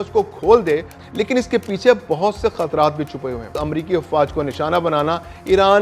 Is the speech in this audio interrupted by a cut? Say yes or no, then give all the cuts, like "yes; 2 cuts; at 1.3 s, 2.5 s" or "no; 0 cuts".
yes; 2 cuts; at 0.9 s, 3.6 s